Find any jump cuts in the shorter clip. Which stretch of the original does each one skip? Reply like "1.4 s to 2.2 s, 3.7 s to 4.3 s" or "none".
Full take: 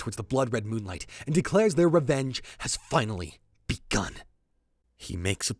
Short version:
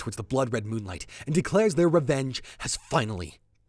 none